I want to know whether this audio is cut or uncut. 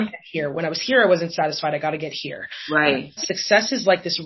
cut